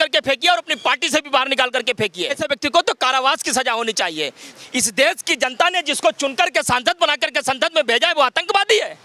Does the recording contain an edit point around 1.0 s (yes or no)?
no